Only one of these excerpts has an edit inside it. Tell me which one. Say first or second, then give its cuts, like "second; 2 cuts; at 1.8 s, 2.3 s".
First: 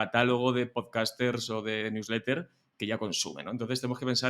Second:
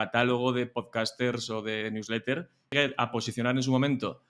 second; 1 cut; at 2.7 s